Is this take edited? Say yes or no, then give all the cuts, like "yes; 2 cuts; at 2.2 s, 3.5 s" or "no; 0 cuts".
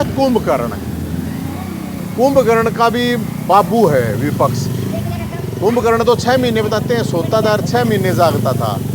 no; 0 cuts